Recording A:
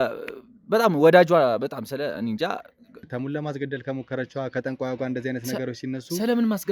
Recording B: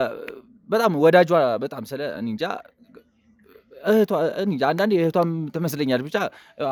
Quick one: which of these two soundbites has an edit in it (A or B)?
A